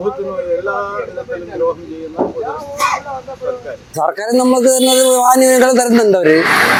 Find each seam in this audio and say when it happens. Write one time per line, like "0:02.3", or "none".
none